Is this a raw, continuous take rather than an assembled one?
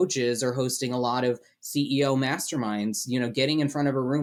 yes; 0 cuts

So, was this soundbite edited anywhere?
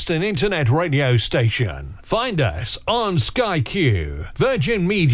no; 0 cuts

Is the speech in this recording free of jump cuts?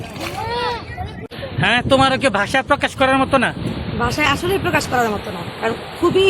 no; 1 cut; at 1.2 s

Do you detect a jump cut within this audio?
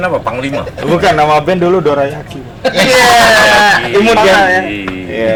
no; 0 cuts

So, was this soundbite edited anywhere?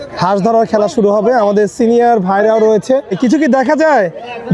yes; 1 cut; at 3.1 s

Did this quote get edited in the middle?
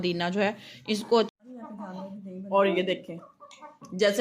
yes; 1 cut; at 1.3 s

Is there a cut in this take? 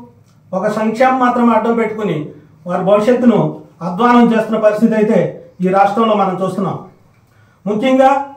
yes; 1 cut; at 3.3 s

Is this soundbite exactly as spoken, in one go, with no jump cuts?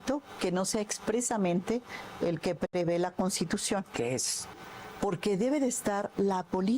no; 1 cut; at 4.6 s

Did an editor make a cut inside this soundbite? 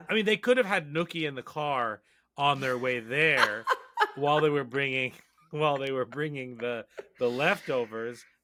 no; 0 cuts

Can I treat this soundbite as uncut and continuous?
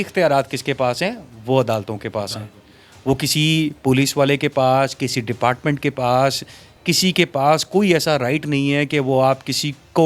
yes; 0 cuts

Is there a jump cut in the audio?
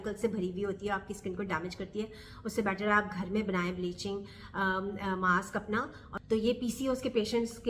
yes; 1 cut; at 6.1 s

